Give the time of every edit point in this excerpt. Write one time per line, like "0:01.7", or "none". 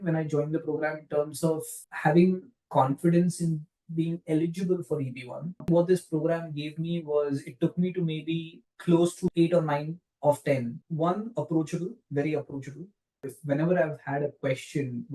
0:10.8